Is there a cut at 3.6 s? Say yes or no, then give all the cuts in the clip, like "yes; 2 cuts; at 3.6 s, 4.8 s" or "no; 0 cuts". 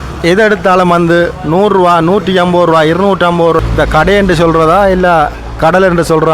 yes; 1 cut; at 3.6 s